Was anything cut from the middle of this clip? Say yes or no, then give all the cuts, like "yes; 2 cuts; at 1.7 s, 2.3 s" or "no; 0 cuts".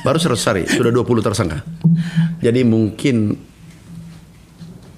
no; 0 cuts